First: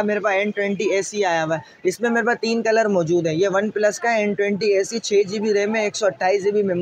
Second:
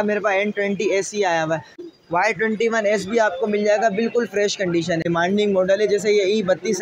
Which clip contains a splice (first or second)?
second